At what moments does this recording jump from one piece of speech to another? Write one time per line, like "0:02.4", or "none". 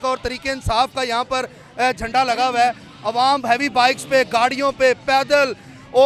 none